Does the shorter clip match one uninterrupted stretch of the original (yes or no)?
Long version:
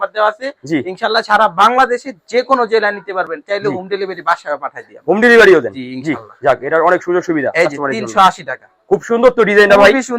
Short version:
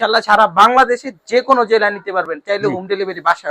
yes